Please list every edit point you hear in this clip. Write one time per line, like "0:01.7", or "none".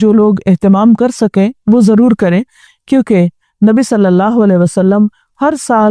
none